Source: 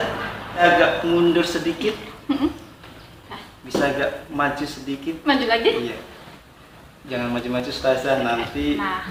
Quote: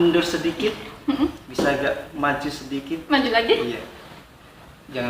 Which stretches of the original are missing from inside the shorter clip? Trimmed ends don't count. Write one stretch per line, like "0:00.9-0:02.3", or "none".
0:02.6-0:03.6